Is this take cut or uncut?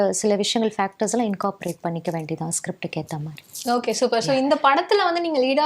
uncut